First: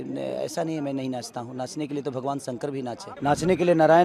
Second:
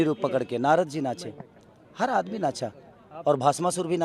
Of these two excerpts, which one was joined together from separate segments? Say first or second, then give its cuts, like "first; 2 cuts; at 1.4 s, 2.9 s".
first; 1 cut; at 3.1 s